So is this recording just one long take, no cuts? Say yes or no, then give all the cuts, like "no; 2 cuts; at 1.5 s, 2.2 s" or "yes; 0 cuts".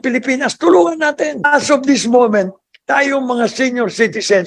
no; 1 cut; at 1.5 s